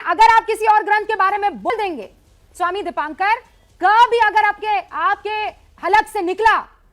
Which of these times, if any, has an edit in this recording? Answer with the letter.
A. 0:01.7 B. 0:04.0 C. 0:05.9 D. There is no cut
A